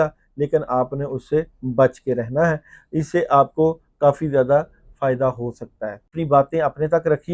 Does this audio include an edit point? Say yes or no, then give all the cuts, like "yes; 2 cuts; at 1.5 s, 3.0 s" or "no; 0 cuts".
yes; 1 cut; at 6.2 s